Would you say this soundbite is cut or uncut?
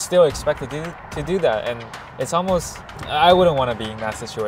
uncut